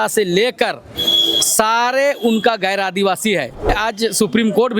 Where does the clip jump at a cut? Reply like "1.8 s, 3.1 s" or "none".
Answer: 3.7 s